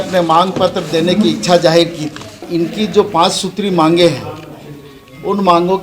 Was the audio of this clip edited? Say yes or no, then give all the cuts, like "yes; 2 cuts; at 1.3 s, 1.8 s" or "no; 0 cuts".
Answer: yes; 1 cut; at 2.4 s